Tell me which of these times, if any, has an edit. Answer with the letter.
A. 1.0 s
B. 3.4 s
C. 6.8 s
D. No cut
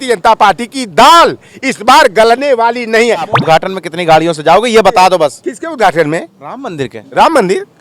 B